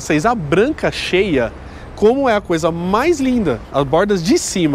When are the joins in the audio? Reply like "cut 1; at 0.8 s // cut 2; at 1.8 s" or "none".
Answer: cut 1; at 3.6 s